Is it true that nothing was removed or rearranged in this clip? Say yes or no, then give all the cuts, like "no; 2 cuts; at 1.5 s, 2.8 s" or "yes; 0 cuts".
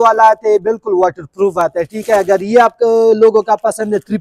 yes; 0 cuts